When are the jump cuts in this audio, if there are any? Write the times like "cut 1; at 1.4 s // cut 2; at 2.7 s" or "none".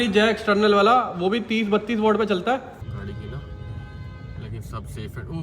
cut 1; at 2.7 s

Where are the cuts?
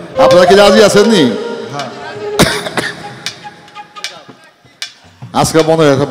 none

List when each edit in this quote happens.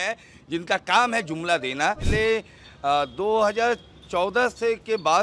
cut 1; at 2.0 s

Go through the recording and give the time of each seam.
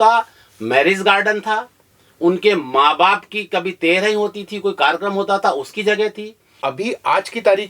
cut 1; at 6.7 s

